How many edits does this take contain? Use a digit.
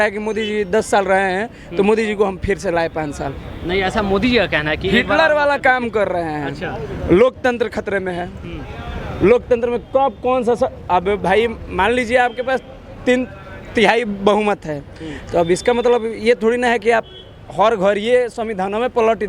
0